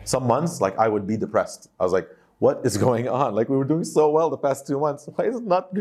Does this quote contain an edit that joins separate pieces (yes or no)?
no